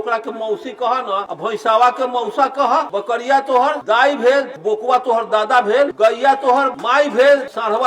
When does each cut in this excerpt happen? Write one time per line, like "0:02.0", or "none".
0:01.3
0:02.9
0:03.8
0:04.5
0:05.9
0:06.8

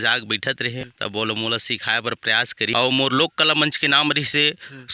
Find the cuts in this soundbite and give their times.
0:00.9
0:02.7

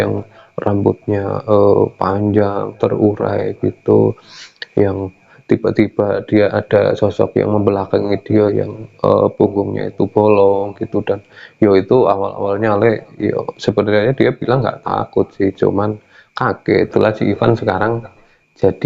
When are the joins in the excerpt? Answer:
0:16.9

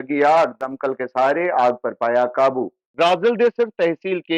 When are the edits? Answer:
0:02.8

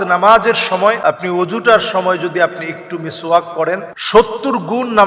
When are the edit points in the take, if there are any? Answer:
0:01.0
0:03.9

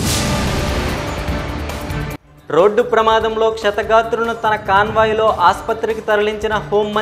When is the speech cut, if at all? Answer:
0:00.9

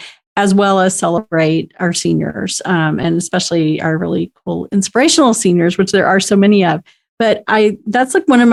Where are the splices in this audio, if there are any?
none

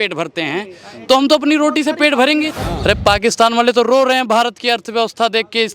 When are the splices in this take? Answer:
0:02.7

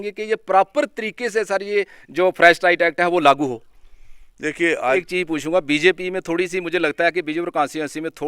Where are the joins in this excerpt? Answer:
0:05.0

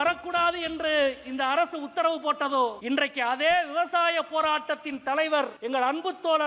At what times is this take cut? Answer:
0:02.8
0:05.6

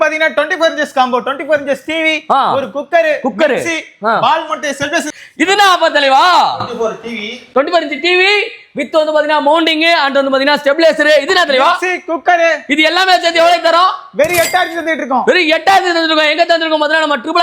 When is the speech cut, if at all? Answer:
0:05.1

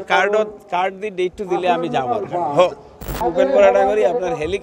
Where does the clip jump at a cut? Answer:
0:03.2

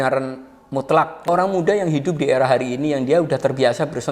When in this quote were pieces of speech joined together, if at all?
0:01.3

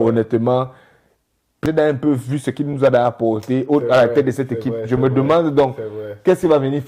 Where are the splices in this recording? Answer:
0:01.6

